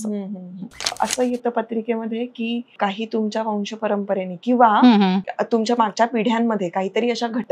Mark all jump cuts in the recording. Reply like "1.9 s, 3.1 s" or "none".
0.9 s, 2.8 s, 5.2 s